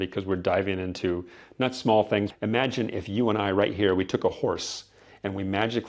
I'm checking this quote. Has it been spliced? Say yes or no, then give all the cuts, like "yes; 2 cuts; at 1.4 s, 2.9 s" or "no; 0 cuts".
yes; 1 cut; at 2.3 s